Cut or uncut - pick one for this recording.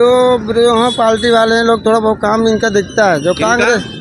uncut